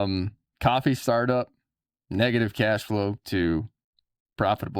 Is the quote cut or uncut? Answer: uncut